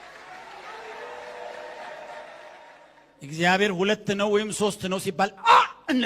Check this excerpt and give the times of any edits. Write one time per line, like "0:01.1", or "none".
0:02.7